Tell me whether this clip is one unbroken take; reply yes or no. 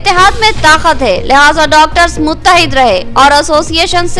yes